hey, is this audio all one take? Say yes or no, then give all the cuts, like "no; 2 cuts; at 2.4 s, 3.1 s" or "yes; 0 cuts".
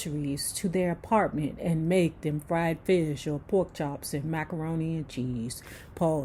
yes; 0 cuts